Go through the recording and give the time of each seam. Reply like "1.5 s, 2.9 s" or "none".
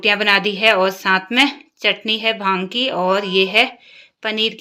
none